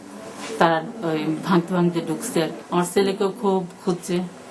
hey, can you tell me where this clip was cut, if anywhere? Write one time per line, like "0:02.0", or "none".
none